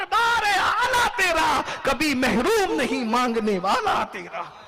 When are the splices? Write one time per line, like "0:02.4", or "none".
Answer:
none